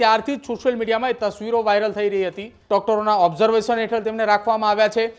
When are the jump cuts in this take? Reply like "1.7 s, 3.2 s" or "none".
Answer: 2.5 s